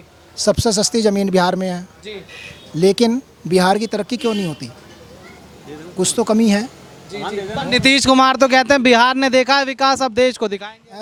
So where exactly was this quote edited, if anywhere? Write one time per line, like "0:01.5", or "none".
none